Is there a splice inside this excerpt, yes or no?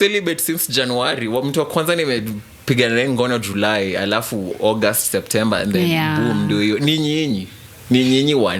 no